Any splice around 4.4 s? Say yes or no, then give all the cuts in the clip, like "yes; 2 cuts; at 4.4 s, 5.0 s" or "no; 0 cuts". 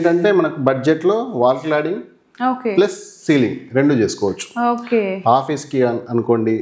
no; 0 cuts